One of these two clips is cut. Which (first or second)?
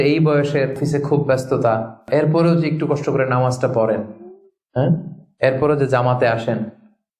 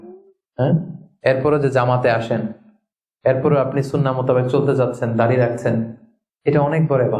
first